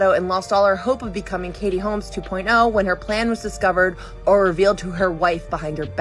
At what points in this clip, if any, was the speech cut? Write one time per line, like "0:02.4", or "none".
none